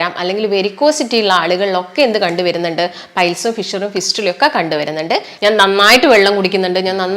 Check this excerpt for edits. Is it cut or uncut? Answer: cut